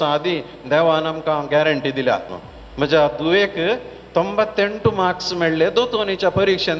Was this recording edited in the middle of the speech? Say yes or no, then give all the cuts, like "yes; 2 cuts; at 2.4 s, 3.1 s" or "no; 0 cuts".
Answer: yes; 1 cut; at 2.4 s